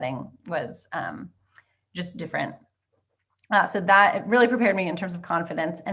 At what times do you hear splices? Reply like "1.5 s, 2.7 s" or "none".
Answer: none